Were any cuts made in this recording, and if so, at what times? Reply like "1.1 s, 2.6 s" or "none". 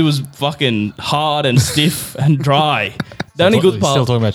none